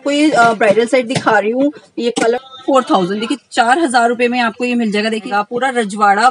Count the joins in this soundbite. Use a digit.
2